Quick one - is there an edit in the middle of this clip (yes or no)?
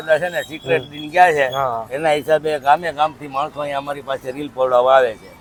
no